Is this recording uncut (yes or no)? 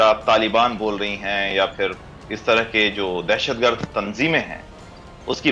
yes